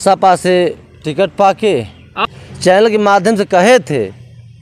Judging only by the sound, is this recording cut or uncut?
uncut